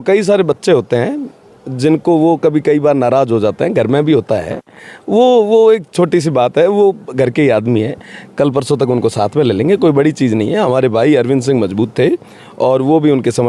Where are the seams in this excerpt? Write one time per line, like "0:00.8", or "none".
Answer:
none